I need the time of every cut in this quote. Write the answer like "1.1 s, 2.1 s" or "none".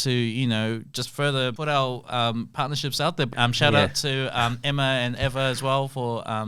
1.6 s